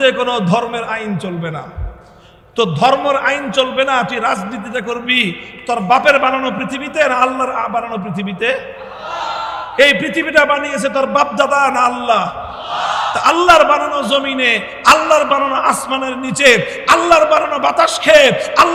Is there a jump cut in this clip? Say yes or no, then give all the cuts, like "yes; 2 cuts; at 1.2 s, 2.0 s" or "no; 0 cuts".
no; 0 cuts